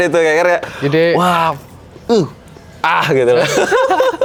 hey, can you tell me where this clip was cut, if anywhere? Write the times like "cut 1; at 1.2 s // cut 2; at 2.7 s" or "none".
none